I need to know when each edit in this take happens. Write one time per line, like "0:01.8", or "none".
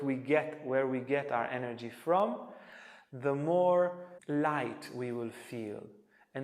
0:04.1